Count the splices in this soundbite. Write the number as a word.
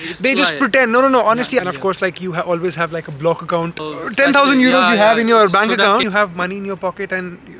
three